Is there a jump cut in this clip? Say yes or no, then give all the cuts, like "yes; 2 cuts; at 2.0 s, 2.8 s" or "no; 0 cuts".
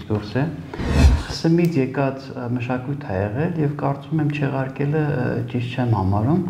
yes; 1 cut; at 0.9 s